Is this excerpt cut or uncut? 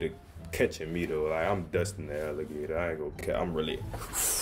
cut